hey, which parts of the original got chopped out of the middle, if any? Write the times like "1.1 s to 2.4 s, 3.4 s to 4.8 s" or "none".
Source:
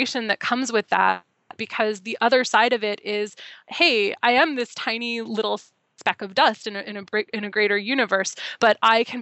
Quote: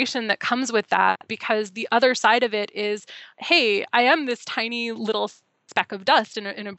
1.3 s to 1.6 s

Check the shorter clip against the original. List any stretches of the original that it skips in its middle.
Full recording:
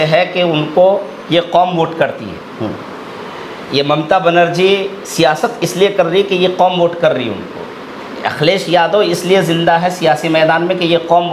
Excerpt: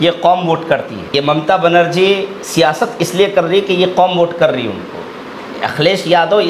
2.3 s to 3.6 s

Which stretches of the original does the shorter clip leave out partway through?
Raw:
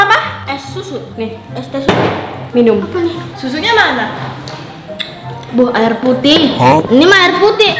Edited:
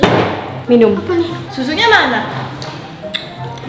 none

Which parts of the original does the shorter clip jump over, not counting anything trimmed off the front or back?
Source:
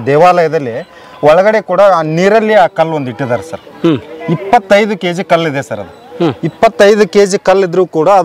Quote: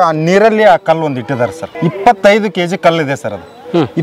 3.6 s to 4.1 s

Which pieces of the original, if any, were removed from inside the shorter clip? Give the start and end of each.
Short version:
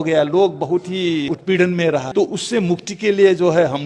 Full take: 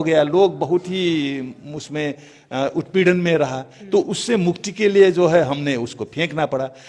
1.3 s to 2.7 s, 3.5 s to 3.8 s

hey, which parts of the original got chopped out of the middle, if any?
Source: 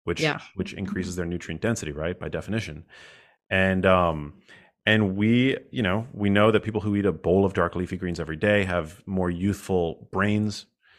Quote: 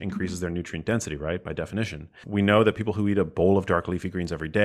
3.0 s to 6.1 s

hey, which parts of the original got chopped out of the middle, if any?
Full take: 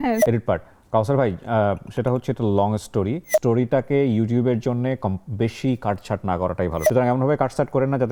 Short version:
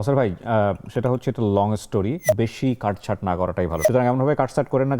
3.2 s to 5.2 s

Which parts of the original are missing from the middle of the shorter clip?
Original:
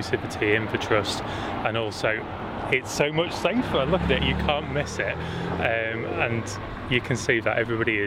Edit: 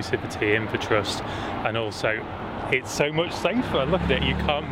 none

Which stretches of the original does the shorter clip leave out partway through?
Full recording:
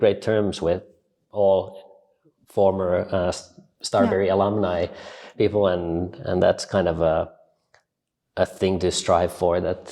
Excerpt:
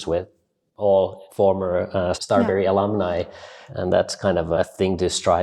1.8 s to 2.4 s, 3.4 s to 3.8 s, 5.2 s to 6.0 s, 7.1 s to 8.4 s

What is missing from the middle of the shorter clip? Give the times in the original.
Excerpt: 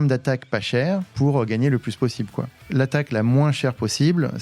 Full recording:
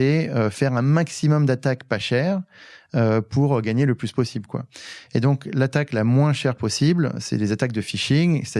2.5 s to 3.3 s, 4.8 s to 5.4 s

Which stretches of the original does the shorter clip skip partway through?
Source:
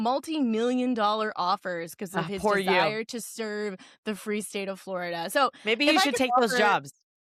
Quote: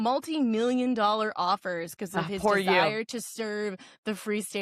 none

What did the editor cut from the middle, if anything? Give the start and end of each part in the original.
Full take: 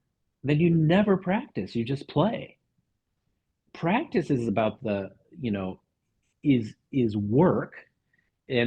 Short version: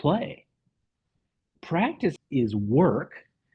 4.3 s to 6.8 s

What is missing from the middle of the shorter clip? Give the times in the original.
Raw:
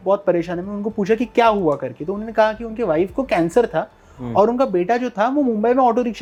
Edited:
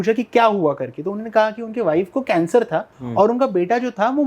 4.0 s to 4.2 s

